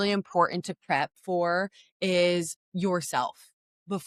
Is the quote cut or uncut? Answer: uncut